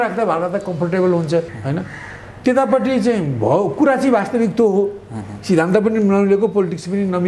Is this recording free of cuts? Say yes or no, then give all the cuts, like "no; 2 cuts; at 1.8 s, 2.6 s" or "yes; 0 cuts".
no; 1 cut; at 1.6 s